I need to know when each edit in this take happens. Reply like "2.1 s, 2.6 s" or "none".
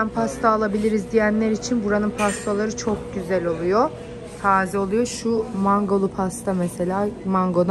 none